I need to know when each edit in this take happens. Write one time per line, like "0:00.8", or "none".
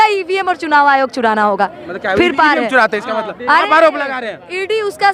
none

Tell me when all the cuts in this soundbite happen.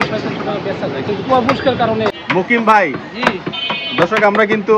0:02.2

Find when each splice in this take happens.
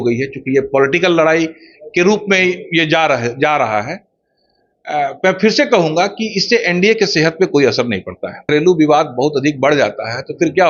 0:08.4

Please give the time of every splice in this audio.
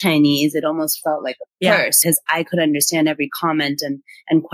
0:02.0

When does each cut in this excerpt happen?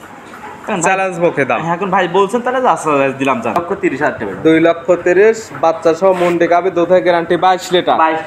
0:03.6

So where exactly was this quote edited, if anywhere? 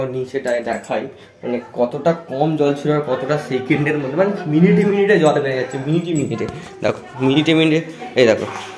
none

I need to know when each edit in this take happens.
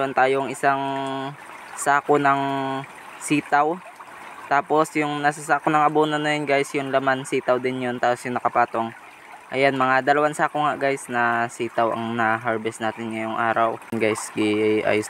0:13.9

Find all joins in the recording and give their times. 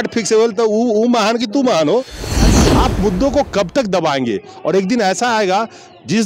0:02.4

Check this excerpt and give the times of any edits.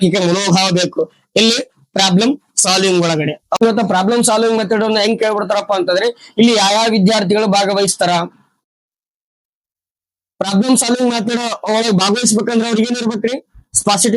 0:03.6

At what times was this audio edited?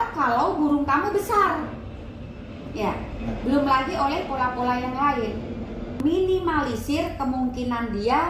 0:06.0

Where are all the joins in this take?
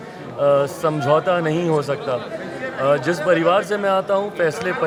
none

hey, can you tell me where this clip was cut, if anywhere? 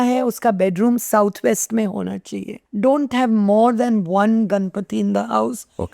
0:02.6

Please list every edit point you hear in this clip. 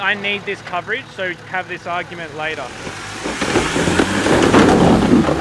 0:02.7

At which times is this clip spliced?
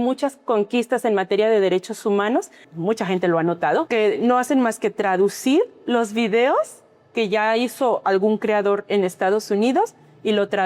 0:02.7
0:03.9

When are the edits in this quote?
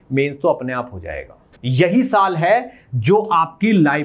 0:01.6

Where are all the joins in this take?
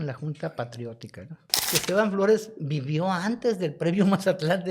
0:01.7

